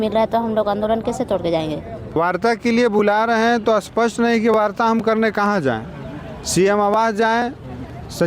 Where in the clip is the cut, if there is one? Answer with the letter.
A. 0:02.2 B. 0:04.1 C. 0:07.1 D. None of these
A